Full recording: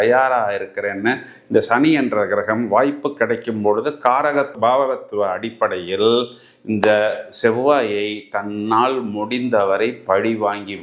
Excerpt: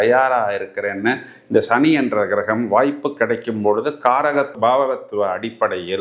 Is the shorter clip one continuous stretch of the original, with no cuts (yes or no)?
yes